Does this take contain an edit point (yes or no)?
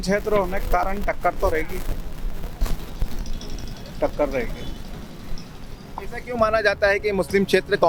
no